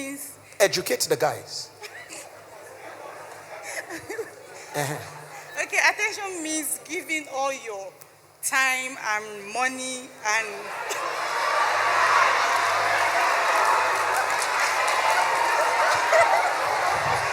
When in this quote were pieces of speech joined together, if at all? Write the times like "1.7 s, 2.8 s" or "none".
none